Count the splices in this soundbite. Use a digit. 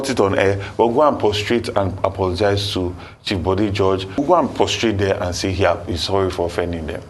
1